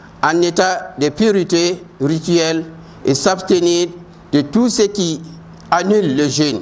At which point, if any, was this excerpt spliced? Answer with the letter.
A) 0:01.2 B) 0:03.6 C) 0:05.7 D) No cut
D